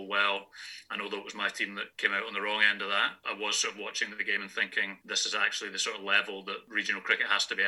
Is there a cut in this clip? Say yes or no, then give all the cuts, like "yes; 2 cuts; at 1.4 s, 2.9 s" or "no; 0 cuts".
yes; 4 cuts; at 1.9 s, 3.2 s, 5.0 s, 6.7 s